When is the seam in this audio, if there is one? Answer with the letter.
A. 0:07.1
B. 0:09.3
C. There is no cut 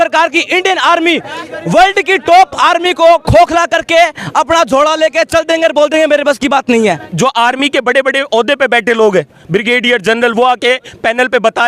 A